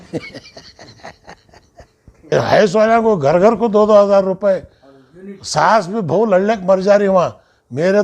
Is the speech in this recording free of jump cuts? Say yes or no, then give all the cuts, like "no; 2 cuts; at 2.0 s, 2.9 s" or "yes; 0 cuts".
no; 1 cut; at 2.1 s